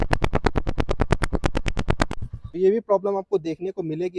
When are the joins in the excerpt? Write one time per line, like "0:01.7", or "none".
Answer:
0:02.4